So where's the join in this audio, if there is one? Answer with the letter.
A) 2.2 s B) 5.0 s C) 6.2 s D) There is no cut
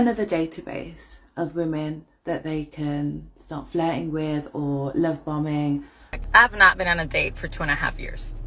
C